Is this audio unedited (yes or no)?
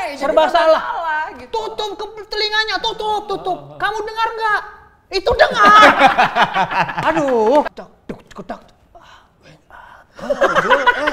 no